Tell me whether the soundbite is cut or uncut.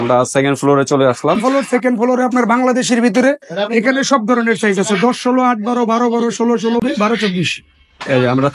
cut